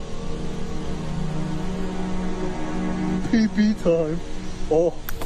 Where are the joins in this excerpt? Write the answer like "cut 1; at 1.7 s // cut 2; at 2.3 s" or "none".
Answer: cut 1; at 3.2 s